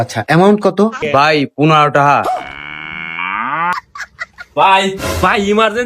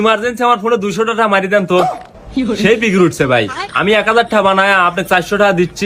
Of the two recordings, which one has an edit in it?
first; 2 cuts; at 1.0 s, 3.7 s

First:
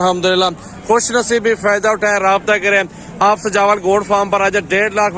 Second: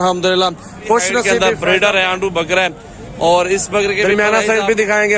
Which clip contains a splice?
second; 2 cuts; at 1.4 s, 4.0 s

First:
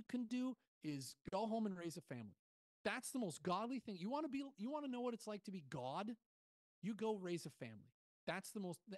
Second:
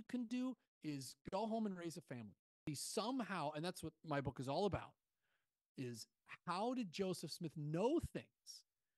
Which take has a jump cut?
second; 1 cut; at 2.6 s

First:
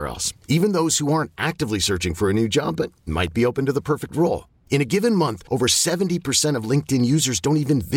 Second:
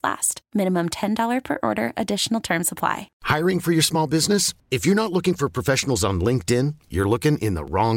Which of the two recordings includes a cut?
second; 1 cut; at 3.1 s

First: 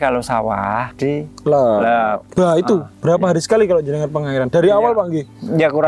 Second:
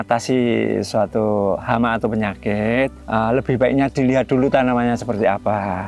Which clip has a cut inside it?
first; 2 cuts; at 0.9 s, 2.2 s

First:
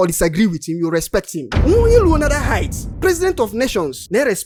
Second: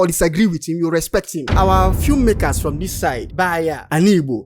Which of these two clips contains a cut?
second; 1 cut; at 1.4 s

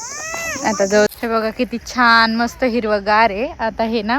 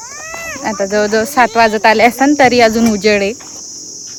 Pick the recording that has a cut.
first; 1 cut; at 1.1 s

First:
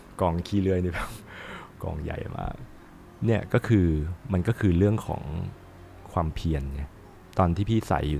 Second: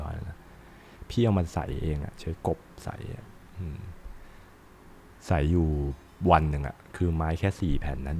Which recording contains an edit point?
first; 1 cut; at 7.1 s

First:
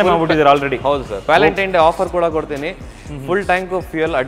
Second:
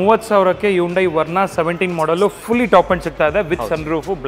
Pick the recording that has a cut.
first; 1 cut; at 1.1 s

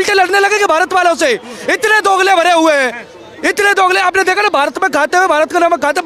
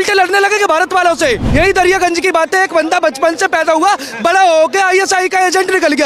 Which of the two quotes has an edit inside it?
second; 1 cut; at 1.4 s

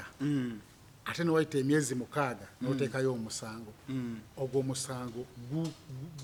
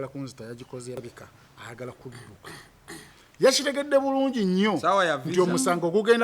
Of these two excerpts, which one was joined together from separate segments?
second; 1 cut; at 1.0 s

